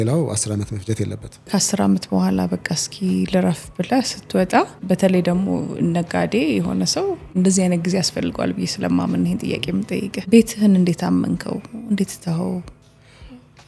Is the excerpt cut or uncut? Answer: cut